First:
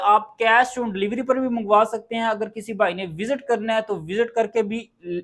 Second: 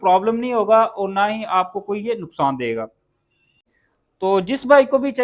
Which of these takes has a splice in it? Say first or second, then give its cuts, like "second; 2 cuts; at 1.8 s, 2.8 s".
second; 1 cut; at 3.5 s